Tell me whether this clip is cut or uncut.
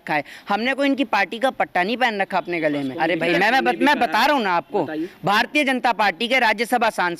cut